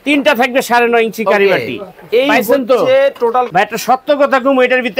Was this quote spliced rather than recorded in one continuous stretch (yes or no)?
yes